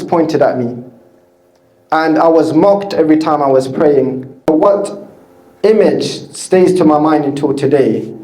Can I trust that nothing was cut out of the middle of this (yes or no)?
no